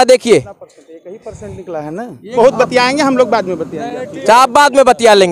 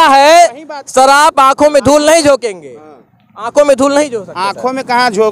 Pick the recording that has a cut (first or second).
first